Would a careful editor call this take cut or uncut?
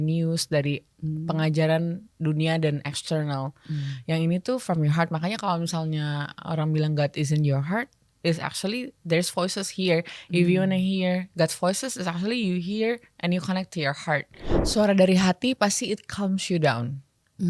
cut